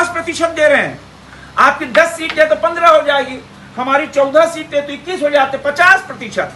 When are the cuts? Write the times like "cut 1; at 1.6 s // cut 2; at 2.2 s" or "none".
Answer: none